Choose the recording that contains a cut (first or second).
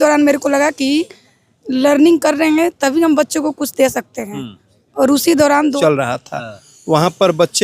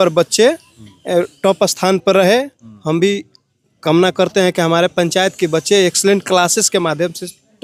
first